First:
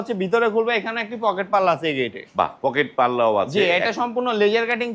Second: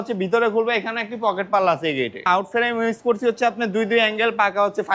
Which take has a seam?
second; 1 cut; at 2.3 s

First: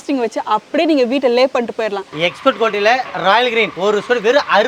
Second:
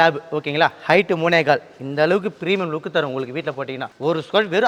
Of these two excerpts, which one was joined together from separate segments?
first; 2 cuts; at 2.1 s, 3.7 s

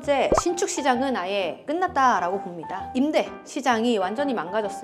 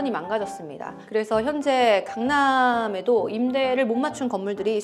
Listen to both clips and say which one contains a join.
first; 1 cut; at 2.9 s

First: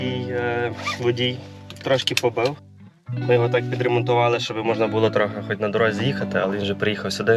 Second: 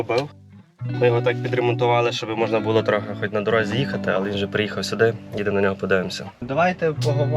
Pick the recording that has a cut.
second; 1 cut; at 6.4 s

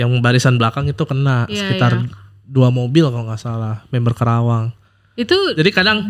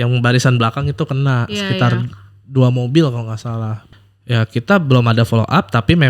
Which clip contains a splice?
second; 1 cut; at 3.8 s

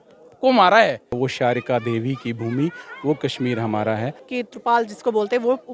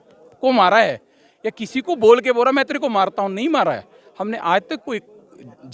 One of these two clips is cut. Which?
first; 2 cuts; at 1.1 s, 4.2 s

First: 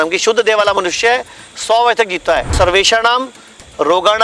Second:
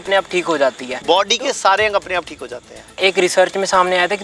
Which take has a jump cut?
first; 1 cut; at 2.5 s

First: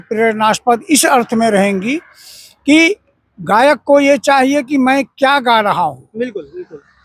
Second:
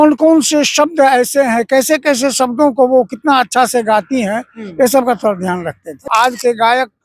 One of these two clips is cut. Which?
second; 1 cut; at 6.1 s

